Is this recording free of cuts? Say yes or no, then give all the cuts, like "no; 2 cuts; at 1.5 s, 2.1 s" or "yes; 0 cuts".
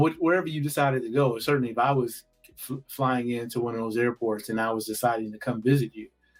yes; 0 cuts